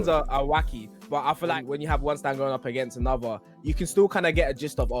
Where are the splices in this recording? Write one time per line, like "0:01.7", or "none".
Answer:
0:01.6